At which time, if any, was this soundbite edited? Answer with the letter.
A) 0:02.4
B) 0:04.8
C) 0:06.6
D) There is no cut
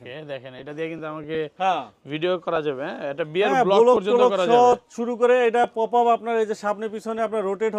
D